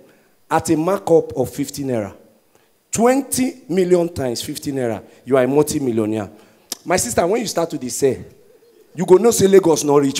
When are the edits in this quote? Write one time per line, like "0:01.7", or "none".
none